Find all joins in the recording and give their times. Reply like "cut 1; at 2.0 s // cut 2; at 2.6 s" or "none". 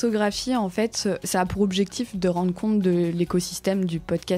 cut 1; at 1.2 s